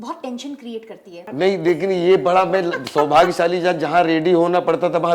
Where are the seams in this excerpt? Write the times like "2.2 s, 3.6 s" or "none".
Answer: 1.2 s